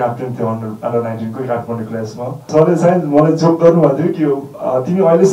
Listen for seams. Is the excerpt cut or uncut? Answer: cut